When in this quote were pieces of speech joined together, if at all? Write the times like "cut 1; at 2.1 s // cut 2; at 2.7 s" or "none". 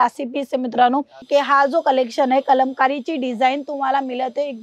cut 1; at 1.2 s